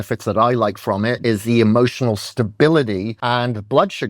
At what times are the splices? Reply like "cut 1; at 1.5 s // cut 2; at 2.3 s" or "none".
cut 1; at 3.1 s